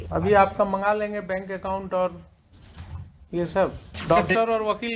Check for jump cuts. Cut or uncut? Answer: cut